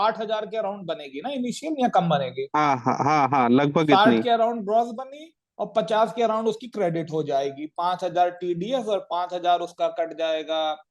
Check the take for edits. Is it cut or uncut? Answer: uncut